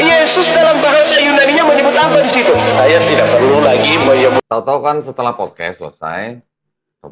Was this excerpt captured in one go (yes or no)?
no